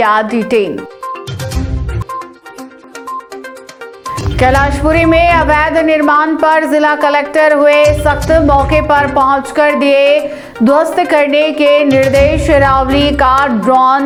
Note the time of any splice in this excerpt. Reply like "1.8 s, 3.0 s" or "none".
none